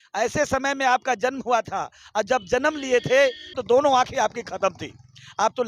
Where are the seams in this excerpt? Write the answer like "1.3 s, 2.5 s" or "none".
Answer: 3.6 s